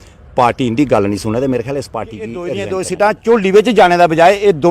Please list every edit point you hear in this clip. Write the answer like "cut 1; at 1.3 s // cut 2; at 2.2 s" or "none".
cut 1; at 2.5 s